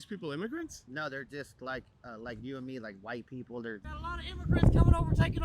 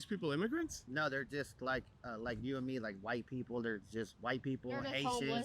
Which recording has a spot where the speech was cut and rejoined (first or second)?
first